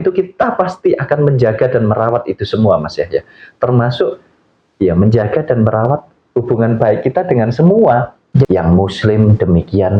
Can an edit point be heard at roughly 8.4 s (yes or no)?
yes